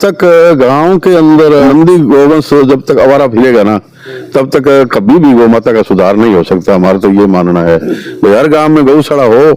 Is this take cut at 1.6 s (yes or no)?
yes